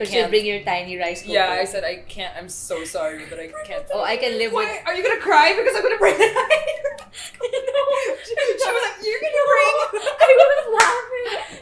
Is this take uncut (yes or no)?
yes